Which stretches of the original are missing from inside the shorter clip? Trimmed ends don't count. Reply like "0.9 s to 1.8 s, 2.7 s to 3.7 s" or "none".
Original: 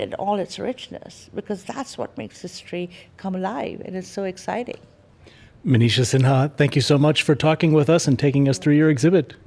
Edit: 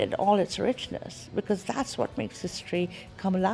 none